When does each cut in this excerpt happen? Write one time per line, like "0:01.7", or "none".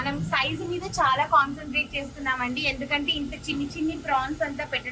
none